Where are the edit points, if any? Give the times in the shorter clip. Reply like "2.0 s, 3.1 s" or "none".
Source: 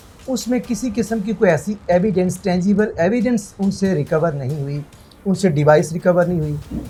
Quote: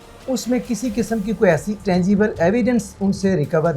1.8 s